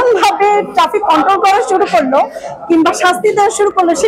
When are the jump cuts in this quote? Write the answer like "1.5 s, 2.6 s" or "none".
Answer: none